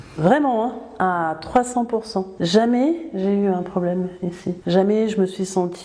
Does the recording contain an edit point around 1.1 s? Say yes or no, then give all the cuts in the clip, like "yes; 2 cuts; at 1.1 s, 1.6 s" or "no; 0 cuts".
no; 2 cuts; at 2.3 s, 4.6 s